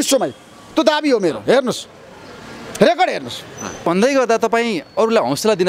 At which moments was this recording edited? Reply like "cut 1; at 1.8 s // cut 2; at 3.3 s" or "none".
cut 1; at 3.8 s